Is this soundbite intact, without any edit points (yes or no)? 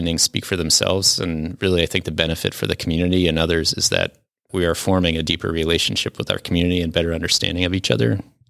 yes